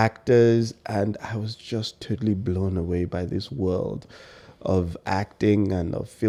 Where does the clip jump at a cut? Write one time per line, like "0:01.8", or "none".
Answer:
none